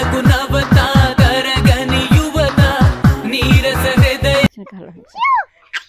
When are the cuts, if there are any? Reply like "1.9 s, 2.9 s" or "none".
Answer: 4.7 s